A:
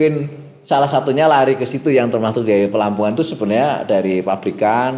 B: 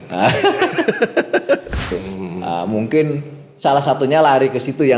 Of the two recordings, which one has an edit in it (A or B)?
B